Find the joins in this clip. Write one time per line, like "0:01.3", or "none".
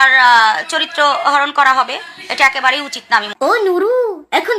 0:03.3